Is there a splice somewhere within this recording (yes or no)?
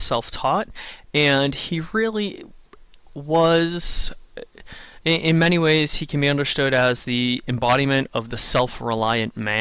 no